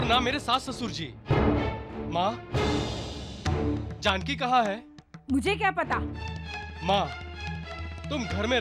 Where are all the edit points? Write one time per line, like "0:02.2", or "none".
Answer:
none